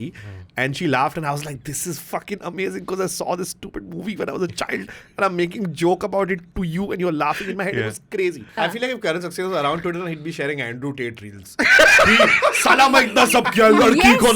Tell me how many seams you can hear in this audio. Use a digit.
1